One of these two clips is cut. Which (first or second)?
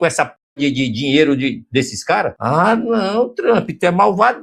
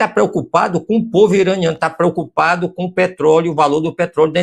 first